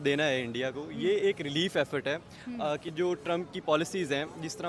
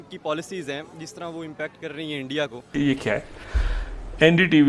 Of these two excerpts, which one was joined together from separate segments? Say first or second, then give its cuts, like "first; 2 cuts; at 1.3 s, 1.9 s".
second; 1 cut; at 2.7 s